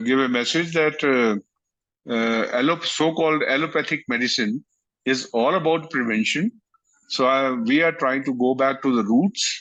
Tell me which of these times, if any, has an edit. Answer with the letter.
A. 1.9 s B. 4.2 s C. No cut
C